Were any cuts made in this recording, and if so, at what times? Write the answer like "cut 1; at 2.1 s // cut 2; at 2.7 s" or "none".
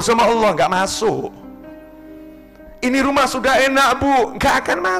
none